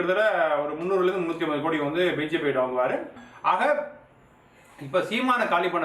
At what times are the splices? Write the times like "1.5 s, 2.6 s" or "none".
3.2 s

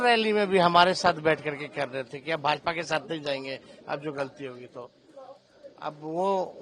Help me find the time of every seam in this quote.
none

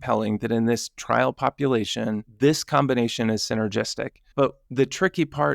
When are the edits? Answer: 2.3 s, 4.6 s

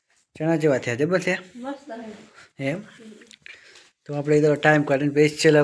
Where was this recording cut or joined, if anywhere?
none

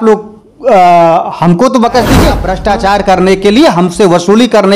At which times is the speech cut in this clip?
2.5 s

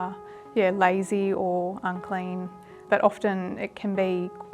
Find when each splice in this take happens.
2.8 s

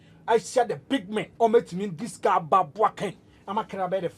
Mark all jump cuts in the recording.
1.3 s

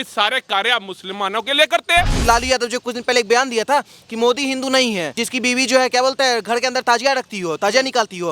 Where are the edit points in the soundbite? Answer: 2.2 s, 5.2 s

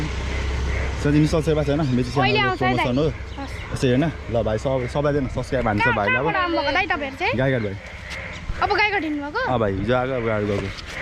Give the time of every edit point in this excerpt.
none

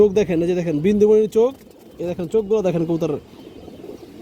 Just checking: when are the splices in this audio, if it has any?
none

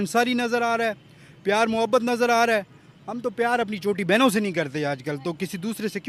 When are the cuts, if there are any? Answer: none

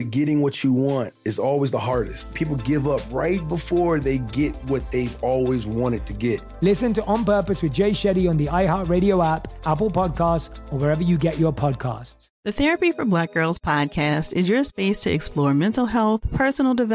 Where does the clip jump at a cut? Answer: 12.2 s

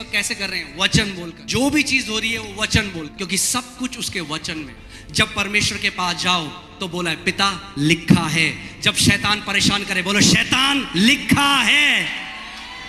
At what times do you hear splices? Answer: 1.4 s, 3.1 s, 4.8 s

